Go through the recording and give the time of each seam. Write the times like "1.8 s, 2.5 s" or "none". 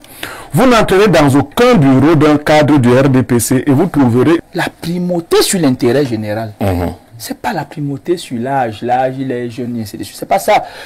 4.4 s